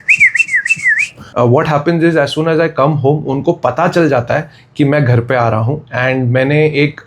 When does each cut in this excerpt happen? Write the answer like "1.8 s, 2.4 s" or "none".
1.2 s